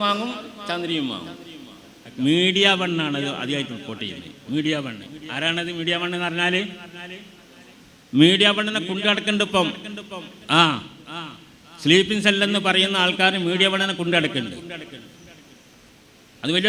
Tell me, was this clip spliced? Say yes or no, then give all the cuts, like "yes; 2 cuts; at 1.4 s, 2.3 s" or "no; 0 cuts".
yes; 1 cut; at 2.0 s